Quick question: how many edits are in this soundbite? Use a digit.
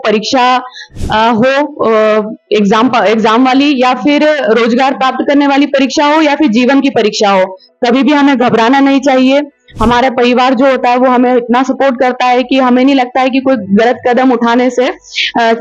0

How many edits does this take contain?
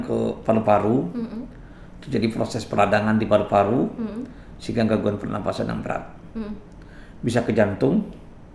0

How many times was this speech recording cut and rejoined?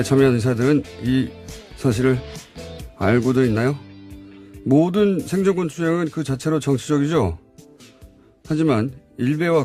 1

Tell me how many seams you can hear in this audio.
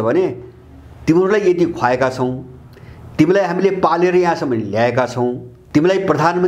1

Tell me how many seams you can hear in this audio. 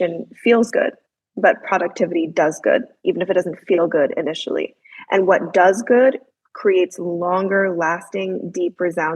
0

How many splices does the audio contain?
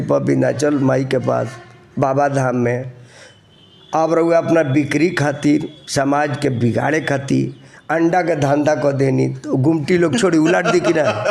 0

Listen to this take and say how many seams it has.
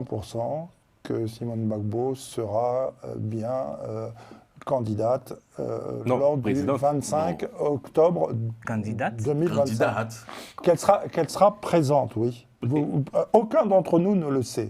0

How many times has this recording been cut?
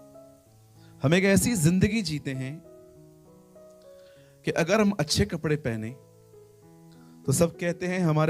3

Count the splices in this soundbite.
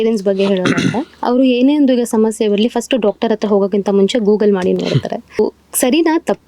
2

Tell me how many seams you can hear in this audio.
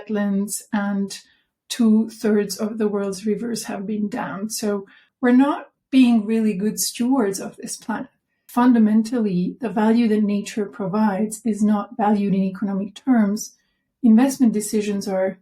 2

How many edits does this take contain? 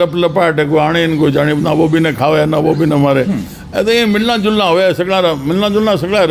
0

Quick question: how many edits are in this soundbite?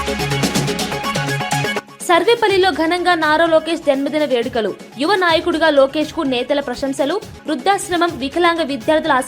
1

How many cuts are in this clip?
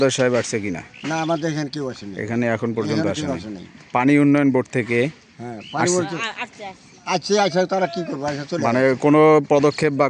0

